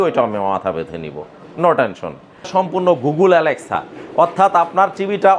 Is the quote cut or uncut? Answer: cut